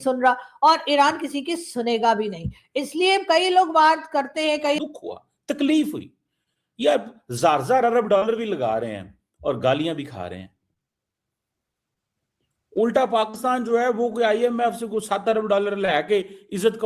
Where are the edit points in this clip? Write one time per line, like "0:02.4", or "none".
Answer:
0:04.8